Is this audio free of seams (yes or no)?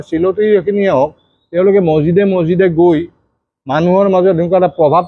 yes